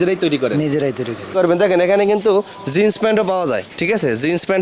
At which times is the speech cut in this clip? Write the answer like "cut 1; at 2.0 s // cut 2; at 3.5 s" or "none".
cut 1; at 1.3 s